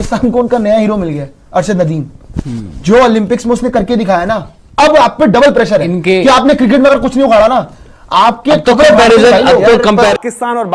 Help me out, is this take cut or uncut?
uncut